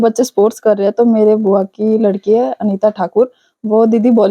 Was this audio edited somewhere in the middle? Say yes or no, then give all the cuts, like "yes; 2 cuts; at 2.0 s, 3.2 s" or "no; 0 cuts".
no; 0 cuts